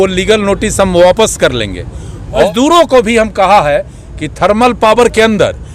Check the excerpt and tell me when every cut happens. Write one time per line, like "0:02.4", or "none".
0:02.4